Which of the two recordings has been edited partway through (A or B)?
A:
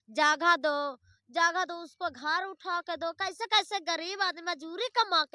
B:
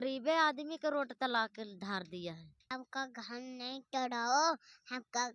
B